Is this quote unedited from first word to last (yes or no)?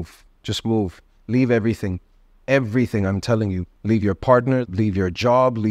no